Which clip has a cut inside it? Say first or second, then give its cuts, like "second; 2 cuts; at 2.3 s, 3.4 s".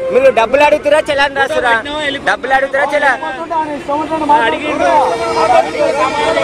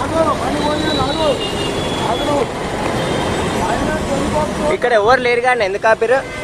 first; 1 cut; at 3.4 s